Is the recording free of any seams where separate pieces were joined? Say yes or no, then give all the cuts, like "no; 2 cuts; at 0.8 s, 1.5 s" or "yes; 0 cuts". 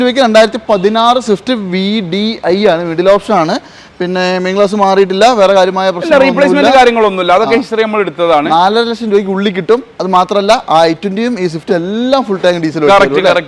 yes; 0 cuts